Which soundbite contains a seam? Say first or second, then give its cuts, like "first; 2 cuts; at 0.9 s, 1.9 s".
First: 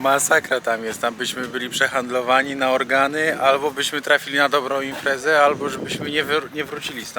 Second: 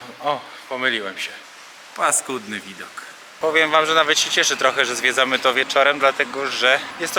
second; 1 cut; at 3.2 s